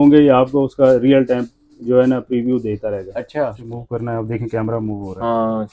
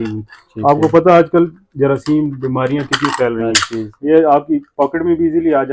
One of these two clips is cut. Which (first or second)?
first